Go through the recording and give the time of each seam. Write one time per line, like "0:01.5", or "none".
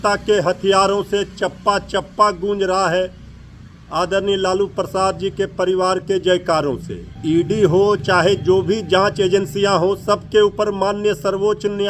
0:07.1

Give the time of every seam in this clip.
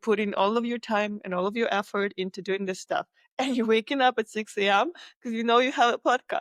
none

